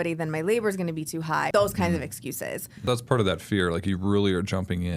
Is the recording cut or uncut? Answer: cut